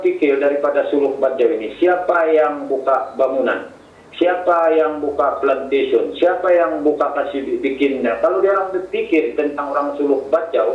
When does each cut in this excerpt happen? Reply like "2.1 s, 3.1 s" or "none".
none